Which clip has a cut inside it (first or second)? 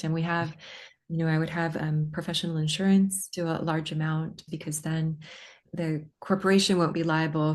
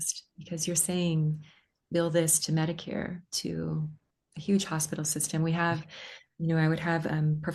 first